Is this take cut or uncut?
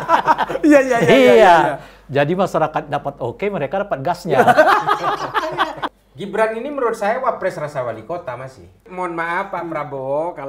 cut